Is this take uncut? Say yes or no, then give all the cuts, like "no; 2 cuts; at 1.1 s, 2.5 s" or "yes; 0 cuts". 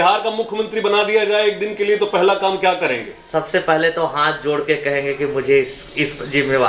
yes; 0 cuts